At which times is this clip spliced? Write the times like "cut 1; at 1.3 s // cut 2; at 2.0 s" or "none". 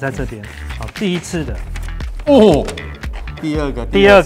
cut 1; at 1.8 s